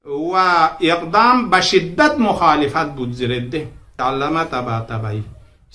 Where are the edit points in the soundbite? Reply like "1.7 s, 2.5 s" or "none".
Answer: 3.9 s